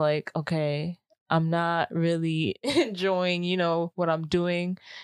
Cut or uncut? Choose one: uncut